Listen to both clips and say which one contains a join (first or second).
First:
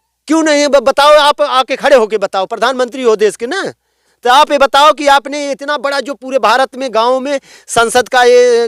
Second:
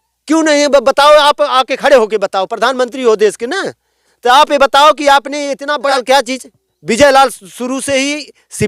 second